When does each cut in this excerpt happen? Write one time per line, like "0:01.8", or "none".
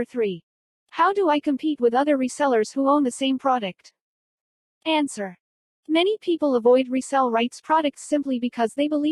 none